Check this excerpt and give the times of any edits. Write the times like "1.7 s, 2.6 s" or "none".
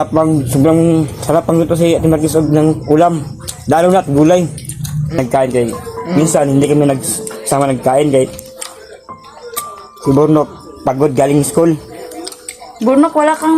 5.2 s